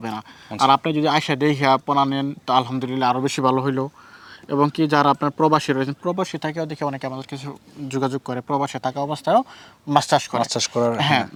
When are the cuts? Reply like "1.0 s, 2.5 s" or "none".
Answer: none